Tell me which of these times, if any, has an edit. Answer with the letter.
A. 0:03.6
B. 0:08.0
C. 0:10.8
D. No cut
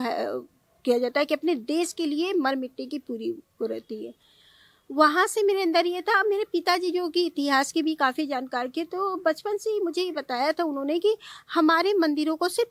D